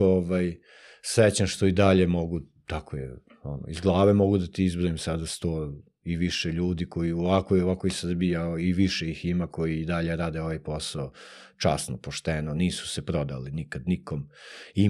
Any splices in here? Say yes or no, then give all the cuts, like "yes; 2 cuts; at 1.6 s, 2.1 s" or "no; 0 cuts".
no; 0 cuts